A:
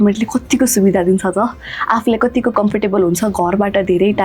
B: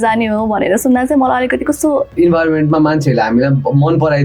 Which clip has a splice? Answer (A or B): B